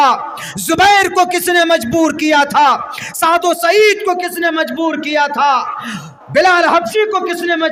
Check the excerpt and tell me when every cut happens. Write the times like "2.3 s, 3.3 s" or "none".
none